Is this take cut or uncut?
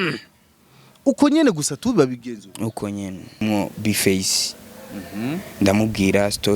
cut